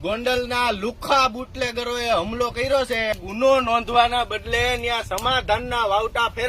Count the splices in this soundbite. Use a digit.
1